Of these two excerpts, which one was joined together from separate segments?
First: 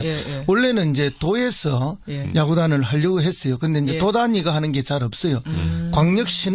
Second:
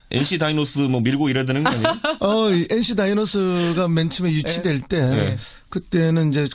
second; 1 cut; at 4.3 s

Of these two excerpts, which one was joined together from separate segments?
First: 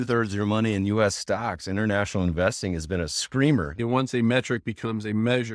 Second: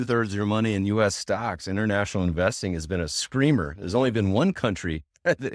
first; 1 cut; at 3.7 s

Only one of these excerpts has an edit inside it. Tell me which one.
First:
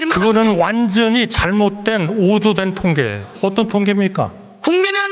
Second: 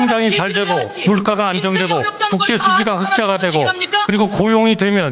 first; 1 cut; at 3.3 s

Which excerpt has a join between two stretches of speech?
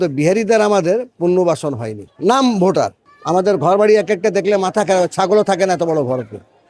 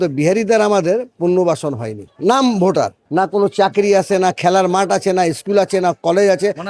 first; 1 cut; at 3.0 s

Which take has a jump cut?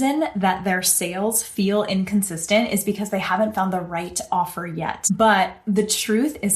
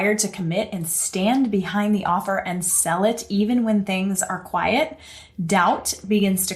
first; 1 cut; at 5.0 s

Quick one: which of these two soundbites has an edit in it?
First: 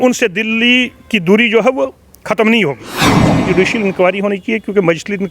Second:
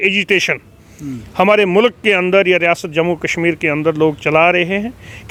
first; 1 cut; at 3.2 s

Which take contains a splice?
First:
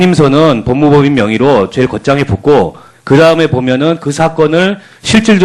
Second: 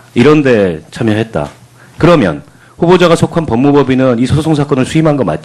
first; 1 cut; at 2.6 s

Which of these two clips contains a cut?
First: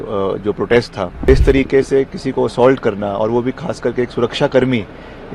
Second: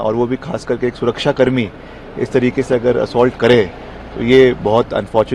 first; 1 cut; at 1.3 s

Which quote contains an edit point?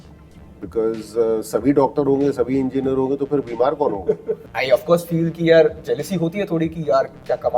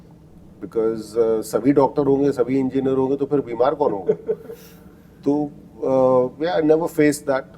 first; 1 cut; at 4.5 s

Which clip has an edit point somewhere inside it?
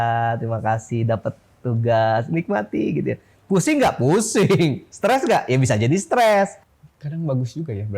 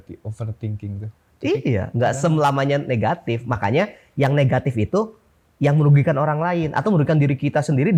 first; 1 cut; at 6.7 s

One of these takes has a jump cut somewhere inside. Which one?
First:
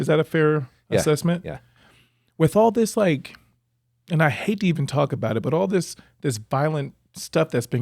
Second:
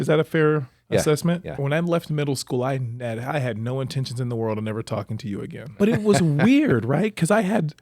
second; 2 cuts; at 1.6 s, 5.6 s

